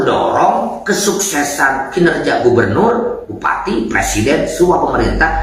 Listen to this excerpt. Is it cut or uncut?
uncut